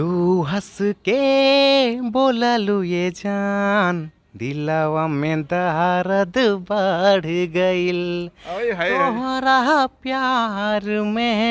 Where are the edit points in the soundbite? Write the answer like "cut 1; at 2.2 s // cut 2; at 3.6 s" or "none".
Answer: none